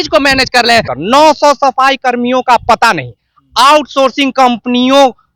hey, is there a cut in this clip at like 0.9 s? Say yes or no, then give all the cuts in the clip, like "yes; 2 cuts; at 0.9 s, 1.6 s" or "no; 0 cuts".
yes; 1 cut; at 0.9 s